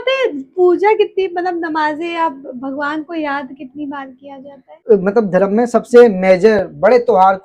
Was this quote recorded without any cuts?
no; 1 cut; at 4.7 s

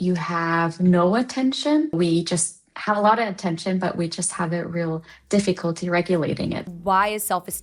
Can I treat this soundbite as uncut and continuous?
no; 2 cuts; at 2.0 s, 6.7 s

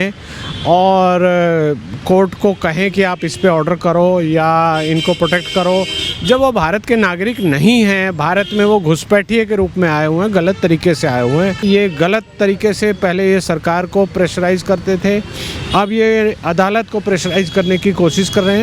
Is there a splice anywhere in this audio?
yes; 1 cut; at 11.6 s

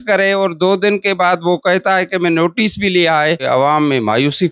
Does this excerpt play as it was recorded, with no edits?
no; 1 cut; at 3.4 s

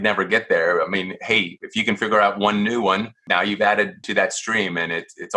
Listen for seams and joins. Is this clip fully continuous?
no; 2 cuts; at 3.2 s, 4.0 s

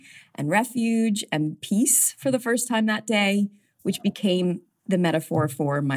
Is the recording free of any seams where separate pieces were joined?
no; 2 cuts; at 1.6 s, 4.7 s

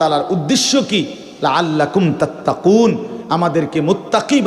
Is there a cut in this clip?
no; 0 cuts

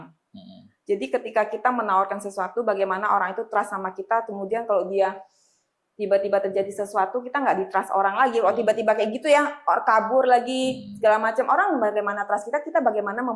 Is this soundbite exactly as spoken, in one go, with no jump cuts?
yes; 0 cuts

